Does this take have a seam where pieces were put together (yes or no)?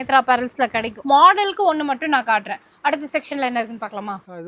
no